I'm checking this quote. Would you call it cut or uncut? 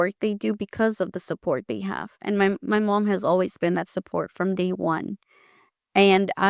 uncut